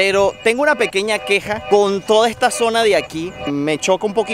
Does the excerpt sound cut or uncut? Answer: cut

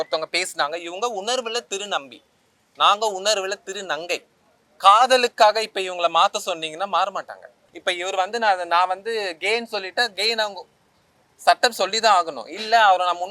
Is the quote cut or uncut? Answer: cut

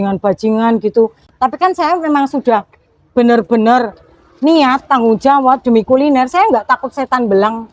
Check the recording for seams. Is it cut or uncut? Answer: uncut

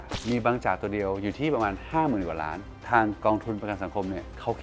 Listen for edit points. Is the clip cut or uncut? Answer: cut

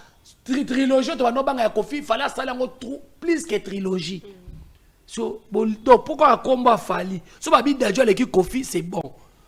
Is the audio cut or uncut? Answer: uncut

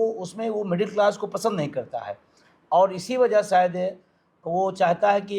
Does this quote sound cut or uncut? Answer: uncut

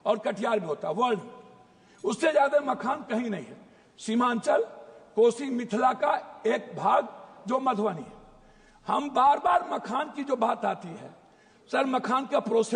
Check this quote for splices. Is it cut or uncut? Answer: uncut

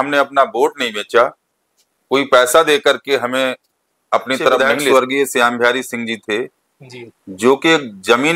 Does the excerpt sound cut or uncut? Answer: cut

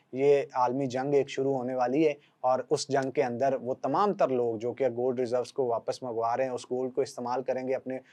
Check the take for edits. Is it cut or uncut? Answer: uncut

